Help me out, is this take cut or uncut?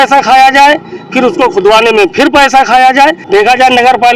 cut